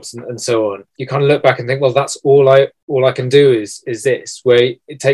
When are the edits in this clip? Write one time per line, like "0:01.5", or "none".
0:00.9
0:02.8